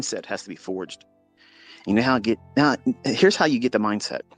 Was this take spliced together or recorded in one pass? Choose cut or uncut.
uncut